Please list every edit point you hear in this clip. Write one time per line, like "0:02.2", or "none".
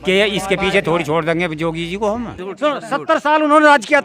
0:02.4